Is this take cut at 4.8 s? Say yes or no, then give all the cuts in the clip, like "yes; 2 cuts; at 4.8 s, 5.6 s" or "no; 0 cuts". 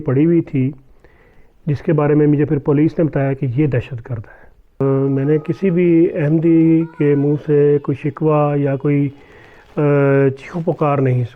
yes; 1 cut; at 4.8 s